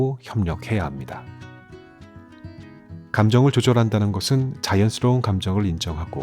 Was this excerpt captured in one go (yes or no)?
no